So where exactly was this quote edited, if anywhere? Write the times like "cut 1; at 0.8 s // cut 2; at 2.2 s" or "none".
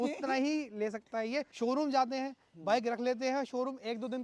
cut 1; at 1.5 s